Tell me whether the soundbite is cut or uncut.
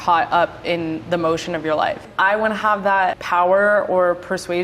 cut